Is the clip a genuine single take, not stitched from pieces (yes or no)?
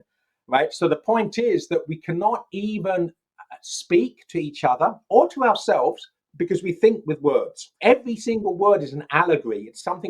no